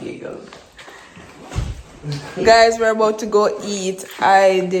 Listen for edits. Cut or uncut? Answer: uncut